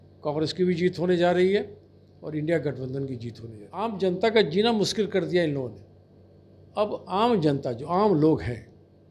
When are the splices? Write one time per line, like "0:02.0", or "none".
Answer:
0:03.8